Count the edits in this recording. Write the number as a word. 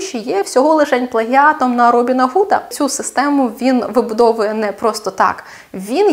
one